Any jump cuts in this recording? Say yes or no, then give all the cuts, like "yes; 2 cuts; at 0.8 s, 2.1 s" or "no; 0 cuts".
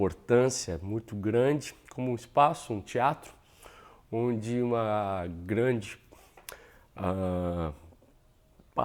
no; 0 cuts